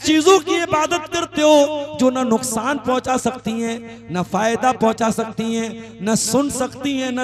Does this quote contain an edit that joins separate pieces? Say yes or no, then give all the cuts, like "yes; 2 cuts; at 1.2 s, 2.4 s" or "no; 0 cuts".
no; 0 cuts